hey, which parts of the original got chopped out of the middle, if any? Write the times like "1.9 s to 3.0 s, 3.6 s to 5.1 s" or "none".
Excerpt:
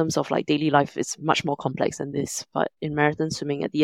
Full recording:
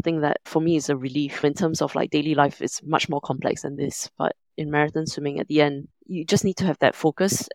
4.4 s to 4.5 s